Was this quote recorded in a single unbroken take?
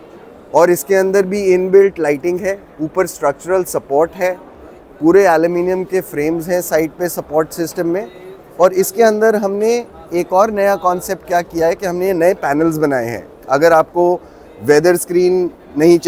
yes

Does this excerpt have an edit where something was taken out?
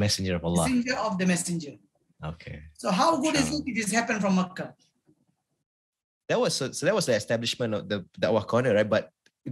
no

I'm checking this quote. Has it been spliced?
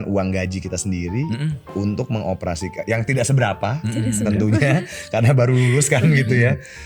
no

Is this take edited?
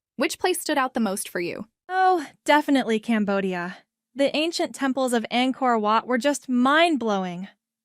yes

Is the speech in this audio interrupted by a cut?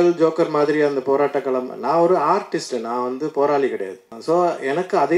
yes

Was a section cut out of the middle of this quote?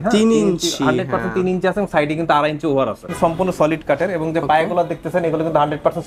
yes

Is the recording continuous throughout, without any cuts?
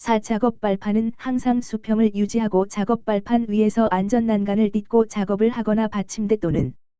no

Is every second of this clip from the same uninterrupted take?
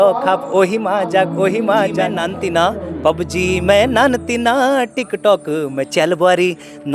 no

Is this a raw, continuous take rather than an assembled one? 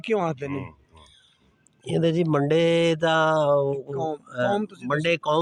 yes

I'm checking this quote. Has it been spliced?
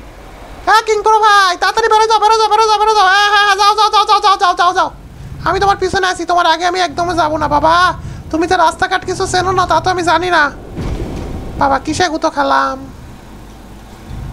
no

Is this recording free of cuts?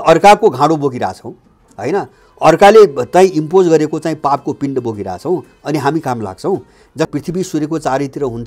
no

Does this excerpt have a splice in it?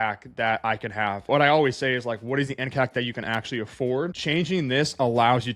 yes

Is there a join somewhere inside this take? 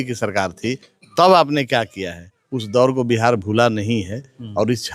no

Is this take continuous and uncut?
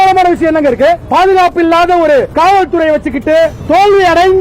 no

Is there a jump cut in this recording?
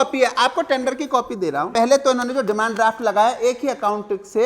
yes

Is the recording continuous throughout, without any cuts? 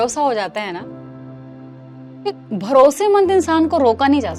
yes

